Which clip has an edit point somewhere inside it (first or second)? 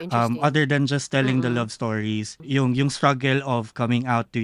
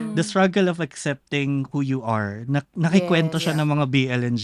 first